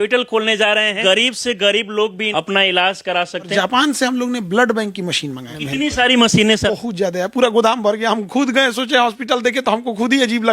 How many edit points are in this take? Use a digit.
5